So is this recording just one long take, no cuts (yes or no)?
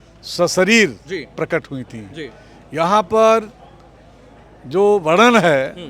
yes